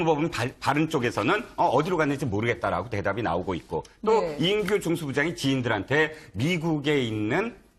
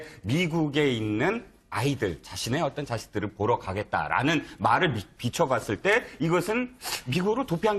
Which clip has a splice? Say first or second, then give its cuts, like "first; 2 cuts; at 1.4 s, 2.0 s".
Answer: second; 1 cut; at 4.4 s